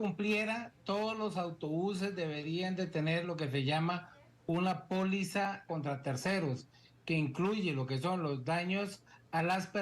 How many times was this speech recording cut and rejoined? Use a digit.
1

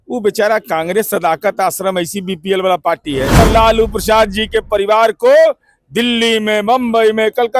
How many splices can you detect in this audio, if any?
1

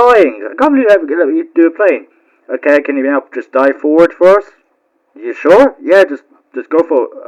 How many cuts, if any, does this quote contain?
0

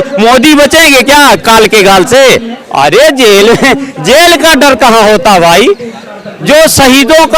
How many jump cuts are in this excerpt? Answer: 1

